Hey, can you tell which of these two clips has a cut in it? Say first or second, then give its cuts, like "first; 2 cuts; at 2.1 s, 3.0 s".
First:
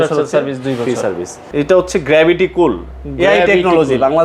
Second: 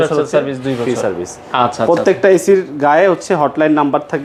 first; 1 cut; at 1.3 s